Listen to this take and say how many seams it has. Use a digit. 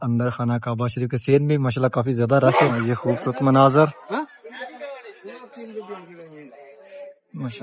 1